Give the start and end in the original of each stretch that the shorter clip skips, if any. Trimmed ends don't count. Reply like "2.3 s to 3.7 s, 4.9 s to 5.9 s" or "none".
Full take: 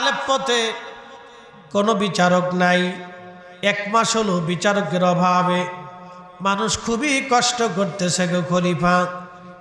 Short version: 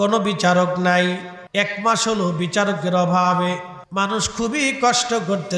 3.1 s to 3.4 s, 5.8 s to 6.2 s